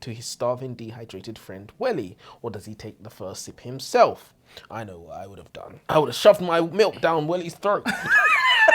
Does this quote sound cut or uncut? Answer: cut